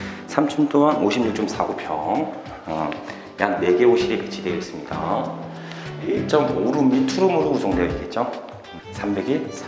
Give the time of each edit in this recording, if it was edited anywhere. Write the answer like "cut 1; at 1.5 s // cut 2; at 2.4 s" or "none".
none